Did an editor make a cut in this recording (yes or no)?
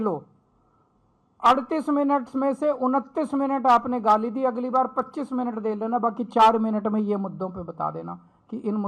no